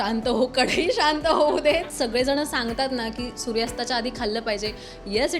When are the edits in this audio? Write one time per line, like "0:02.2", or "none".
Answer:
0:01.9